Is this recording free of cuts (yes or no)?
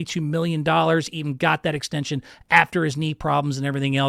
yes